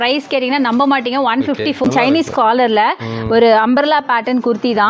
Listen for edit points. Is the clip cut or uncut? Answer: cut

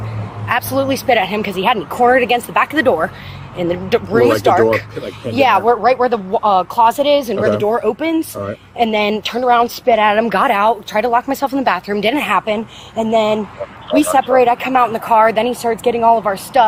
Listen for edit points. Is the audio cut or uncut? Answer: uncut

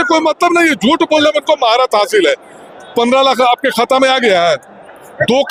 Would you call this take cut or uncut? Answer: uncut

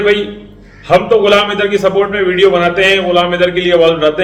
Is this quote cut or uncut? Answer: uncut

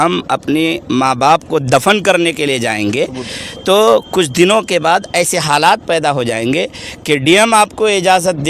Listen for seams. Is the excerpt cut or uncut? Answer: uncut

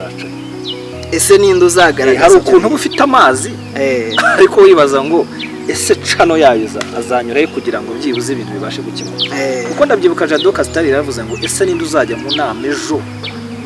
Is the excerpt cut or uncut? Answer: uncut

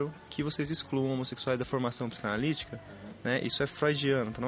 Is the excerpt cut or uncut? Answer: uncut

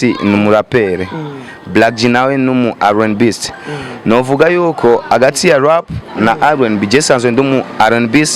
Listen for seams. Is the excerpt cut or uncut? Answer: uncut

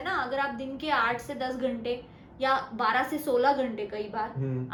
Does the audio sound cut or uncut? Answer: uncut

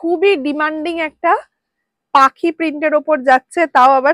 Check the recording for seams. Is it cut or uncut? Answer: uncut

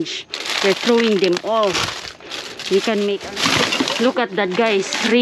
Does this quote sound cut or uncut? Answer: cut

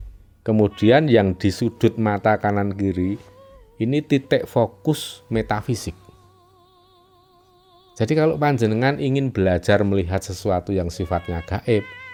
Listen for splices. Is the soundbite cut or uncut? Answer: uncut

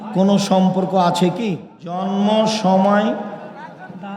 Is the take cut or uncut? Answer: cut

